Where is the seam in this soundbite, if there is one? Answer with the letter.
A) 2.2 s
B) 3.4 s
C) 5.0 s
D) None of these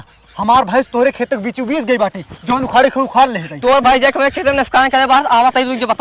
D